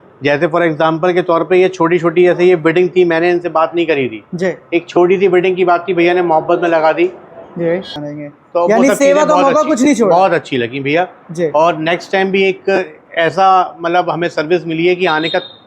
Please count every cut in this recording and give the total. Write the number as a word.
one